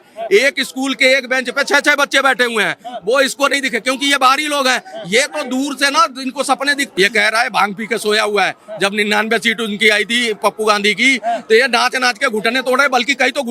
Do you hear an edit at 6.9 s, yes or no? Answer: yes